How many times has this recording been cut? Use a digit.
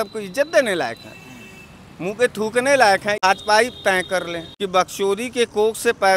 2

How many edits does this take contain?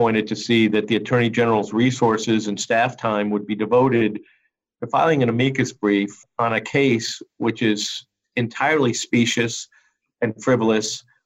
1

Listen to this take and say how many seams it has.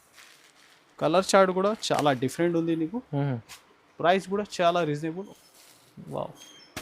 1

